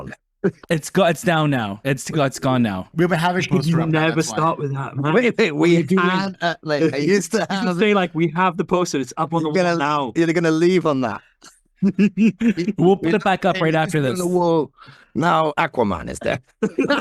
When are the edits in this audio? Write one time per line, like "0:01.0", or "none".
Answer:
none

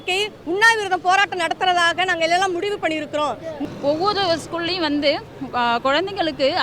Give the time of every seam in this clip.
0:03.6

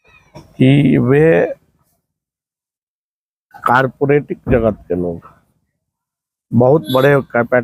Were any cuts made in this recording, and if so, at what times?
none

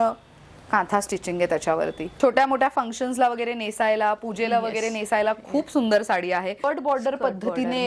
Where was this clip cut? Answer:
0:02.0
0:06.7

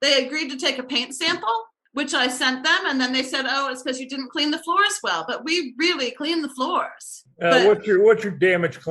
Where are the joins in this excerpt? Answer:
0:01.8
0:07.2

